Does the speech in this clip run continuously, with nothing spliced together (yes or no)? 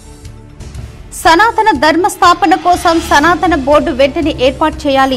yes